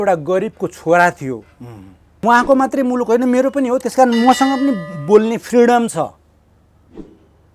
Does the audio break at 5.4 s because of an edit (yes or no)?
no